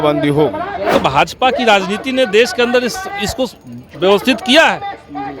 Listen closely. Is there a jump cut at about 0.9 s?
yes; 1 cut; at 0.9 s

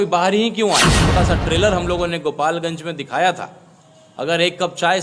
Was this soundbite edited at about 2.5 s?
no; 1 cut; at 1.0 s

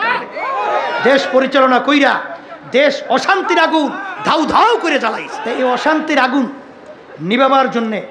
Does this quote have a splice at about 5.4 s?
yes; 1 cut; at 5.4 s

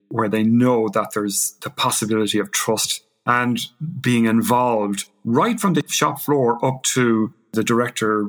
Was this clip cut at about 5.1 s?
no; 2 cuts; at 3.3 s, 7.4 s

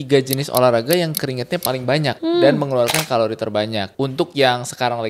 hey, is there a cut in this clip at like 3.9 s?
yes; 2 cuts; at 2.2 s, 3.9 s

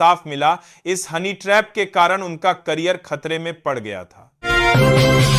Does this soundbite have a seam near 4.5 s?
yes; 1 cut; at 4.5 s

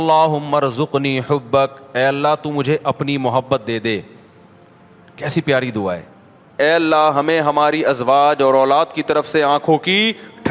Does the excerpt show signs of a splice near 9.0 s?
no; 1 cut; at 6.6 s

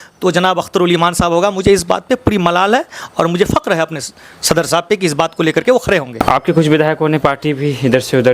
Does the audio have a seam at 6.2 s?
yes; 1 cut; at 6.2 s

